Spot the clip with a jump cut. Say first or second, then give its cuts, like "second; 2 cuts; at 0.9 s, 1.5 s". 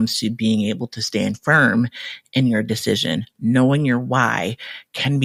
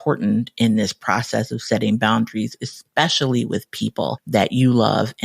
second; 1 cut; at 4.2 s